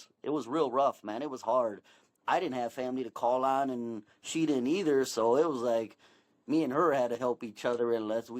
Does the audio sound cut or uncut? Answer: cut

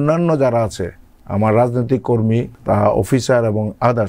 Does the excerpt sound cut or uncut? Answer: cut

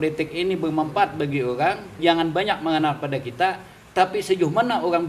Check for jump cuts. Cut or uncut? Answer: uncut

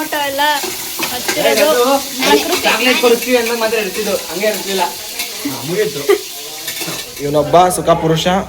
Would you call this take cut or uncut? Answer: cut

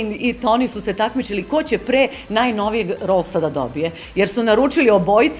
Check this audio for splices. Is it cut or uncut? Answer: uncut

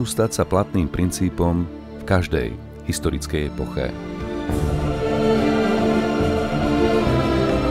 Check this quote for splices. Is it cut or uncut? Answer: cut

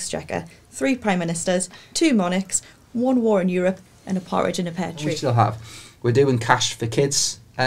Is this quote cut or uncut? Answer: cut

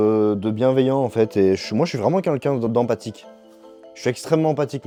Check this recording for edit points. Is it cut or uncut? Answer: uncut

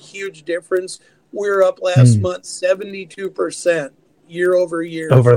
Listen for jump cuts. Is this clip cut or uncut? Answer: uncut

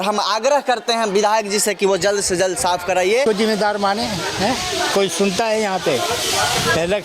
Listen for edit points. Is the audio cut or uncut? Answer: cut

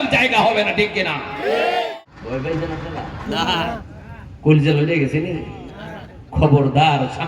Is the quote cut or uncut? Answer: cut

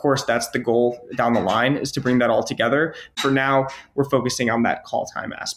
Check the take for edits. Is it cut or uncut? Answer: cut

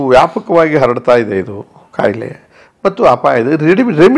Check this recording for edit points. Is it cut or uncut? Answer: uncut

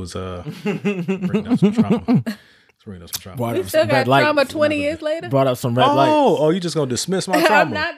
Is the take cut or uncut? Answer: uncut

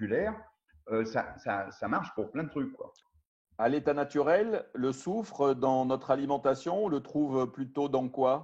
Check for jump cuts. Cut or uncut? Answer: cut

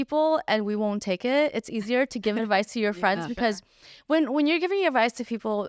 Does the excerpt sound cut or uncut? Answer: uncut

